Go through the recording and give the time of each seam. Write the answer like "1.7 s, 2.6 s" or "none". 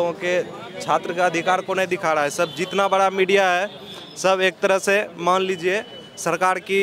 none

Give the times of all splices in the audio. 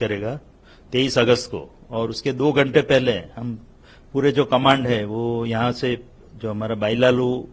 none

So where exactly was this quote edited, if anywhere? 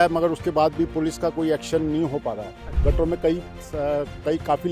2.8 s

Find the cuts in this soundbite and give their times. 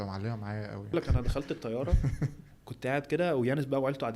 0.9 s, 2.6 s

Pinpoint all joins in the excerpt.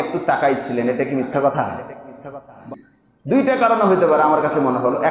2.6 s

